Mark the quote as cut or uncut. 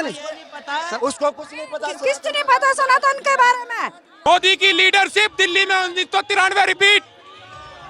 cut